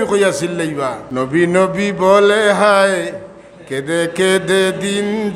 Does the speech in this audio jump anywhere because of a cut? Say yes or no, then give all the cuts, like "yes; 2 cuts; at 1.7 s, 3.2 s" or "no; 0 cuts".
yes; 1 cut; at 1.0 s